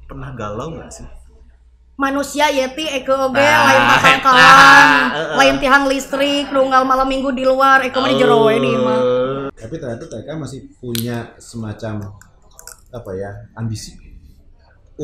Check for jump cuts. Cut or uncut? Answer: cut